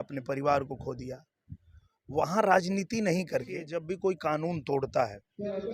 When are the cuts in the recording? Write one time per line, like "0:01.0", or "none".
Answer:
0:03.7

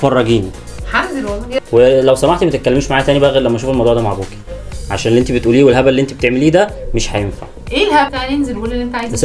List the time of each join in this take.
0:01.5
0:08.1

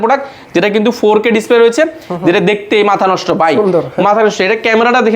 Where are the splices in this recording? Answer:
none

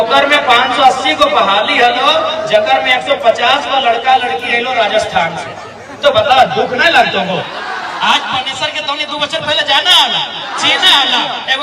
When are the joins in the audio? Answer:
0:07.6

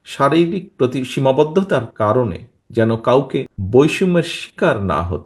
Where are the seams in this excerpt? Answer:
0:03.6

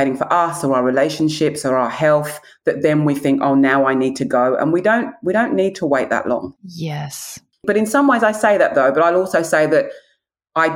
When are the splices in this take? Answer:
none

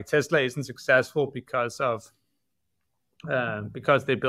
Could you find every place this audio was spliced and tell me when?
none

